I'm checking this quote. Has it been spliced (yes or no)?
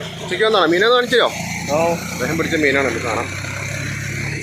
no